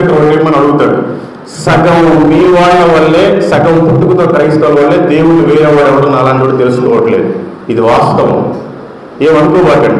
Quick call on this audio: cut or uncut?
uncut